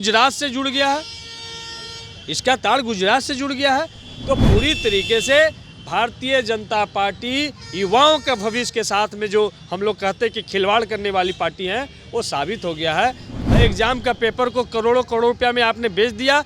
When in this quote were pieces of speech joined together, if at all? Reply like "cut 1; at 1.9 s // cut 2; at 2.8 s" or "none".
cut 1; at 13.4 s